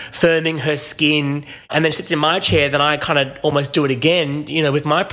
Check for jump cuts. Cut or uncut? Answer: cut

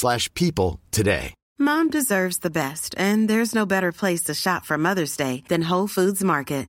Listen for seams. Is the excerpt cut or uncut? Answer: cut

